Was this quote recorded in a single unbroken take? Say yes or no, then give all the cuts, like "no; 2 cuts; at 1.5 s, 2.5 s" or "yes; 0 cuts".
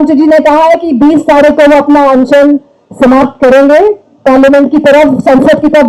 yes; 0 cuts